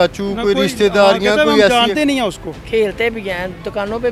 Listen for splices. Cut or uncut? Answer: cut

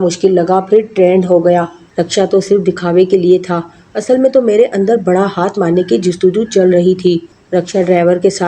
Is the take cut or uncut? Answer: cut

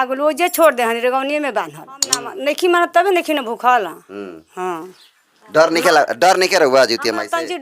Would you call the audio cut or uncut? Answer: cut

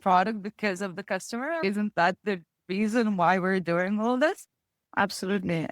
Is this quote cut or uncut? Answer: cut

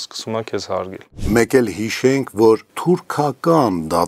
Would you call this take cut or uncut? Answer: cut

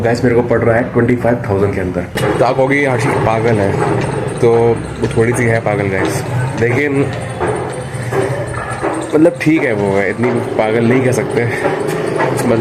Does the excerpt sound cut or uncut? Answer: cut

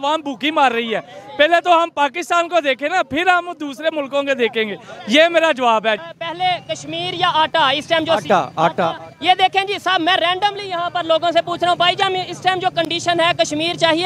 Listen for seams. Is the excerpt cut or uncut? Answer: cut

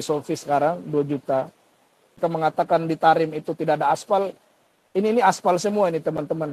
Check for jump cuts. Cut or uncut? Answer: cut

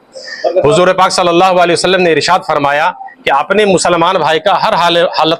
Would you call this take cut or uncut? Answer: uncut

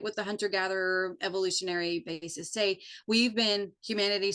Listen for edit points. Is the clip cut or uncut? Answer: uncut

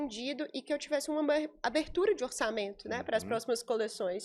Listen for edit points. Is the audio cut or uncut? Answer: uncut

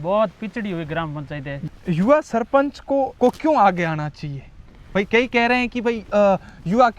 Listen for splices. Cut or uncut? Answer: cut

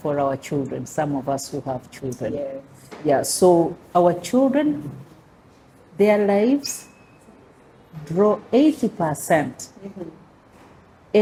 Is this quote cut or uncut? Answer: uncut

